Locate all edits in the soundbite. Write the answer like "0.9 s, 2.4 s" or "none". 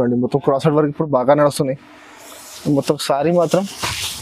none

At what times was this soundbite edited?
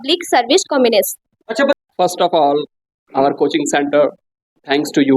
1.8 s

